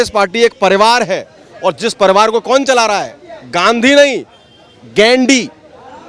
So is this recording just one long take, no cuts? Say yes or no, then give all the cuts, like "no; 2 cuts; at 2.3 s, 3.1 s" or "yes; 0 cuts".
yes; 0 cuts